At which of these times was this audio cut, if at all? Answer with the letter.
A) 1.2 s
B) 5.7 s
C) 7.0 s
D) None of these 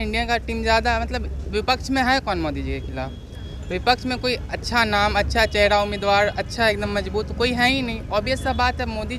D